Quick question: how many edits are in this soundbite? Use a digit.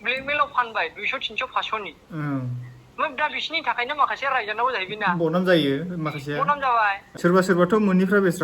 1